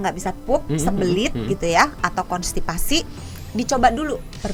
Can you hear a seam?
no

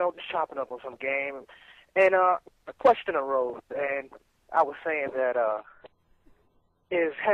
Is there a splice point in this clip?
no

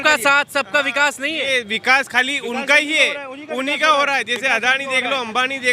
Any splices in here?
no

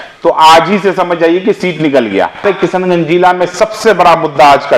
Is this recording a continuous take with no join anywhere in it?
no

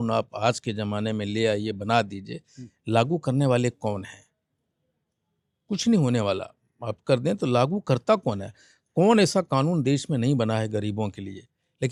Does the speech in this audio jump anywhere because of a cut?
no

